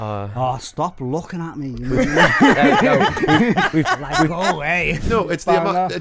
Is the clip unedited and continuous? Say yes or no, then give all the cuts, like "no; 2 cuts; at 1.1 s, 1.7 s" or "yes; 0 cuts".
no; 1 cut; at 5.0 s